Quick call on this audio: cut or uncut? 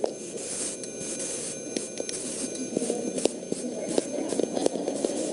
uncut